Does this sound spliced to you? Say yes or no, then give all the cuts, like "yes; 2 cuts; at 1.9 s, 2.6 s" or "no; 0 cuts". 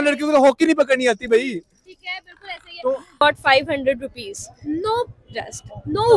yes; 1 cut; at 3.2 s